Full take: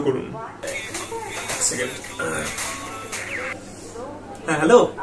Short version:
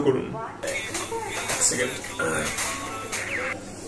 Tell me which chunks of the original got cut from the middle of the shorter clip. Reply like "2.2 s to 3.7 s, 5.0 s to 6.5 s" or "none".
none